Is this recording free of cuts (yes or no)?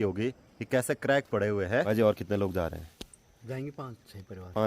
no